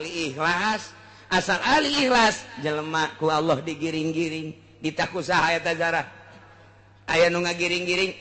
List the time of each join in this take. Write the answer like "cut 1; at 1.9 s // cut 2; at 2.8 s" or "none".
none